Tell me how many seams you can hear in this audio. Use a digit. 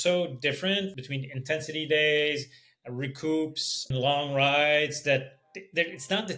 2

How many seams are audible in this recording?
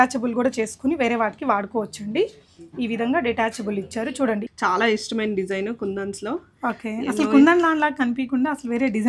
1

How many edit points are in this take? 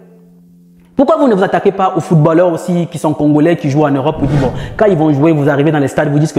0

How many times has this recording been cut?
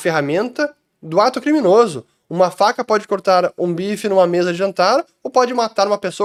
0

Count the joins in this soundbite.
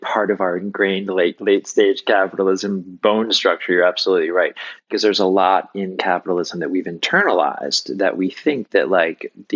1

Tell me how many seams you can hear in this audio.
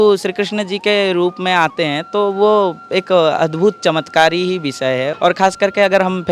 1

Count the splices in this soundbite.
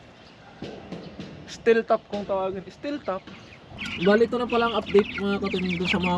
1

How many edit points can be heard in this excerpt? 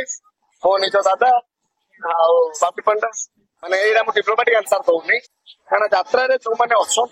1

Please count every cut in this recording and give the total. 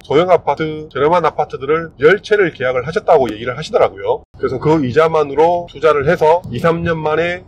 1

